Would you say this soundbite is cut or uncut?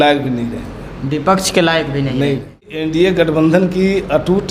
cut